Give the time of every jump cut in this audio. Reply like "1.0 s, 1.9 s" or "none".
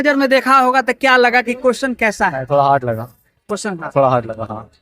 none